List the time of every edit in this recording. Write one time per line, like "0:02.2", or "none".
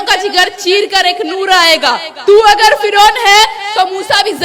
none